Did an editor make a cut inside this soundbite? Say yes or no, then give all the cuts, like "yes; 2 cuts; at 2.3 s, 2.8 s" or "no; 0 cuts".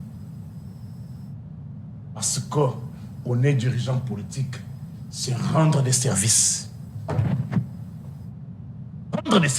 no; 0 cuts